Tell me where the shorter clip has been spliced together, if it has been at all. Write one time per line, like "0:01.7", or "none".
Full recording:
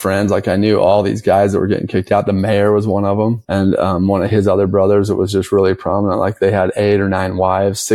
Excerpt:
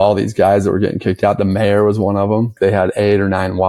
0:02.5